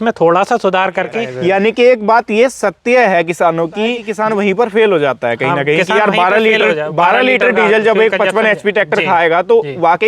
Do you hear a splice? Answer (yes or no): yes